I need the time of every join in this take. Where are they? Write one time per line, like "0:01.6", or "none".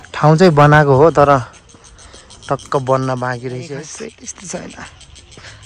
0:03.7